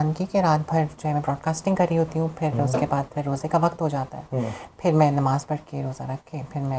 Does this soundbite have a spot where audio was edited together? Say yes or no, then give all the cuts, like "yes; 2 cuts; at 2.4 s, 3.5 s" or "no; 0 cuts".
no; 0 cuts